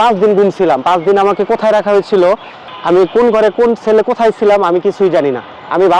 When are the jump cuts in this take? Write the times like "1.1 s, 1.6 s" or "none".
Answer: none